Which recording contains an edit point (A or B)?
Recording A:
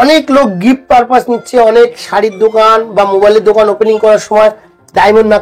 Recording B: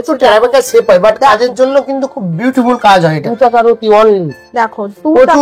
B